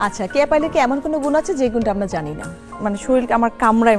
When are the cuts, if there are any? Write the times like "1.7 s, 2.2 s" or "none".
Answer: 2.7 s